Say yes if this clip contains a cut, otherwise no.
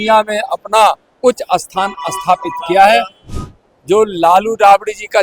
yes